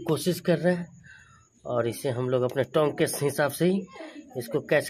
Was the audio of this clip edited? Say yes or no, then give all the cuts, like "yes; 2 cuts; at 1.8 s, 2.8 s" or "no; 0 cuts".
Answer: no; 0 cuts